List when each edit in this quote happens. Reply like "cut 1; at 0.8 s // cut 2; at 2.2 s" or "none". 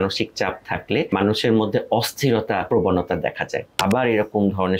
cut 1; at 1.1 s // cut 2; at 2.6 s // cut 3; at 3.7 s